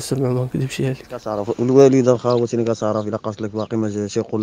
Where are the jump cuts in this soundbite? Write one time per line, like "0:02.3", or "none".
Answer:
0:01.3